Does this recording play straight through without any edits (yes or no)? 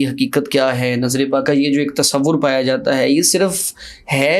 no